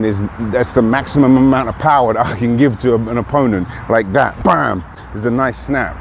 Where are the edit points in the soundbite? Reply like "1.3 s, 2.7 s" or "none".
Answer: none